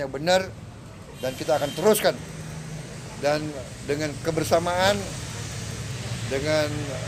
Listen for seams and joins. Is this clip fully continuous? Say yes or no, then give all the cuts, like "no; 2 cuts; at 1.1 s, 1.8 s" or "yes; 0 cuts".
yes; 0 cuts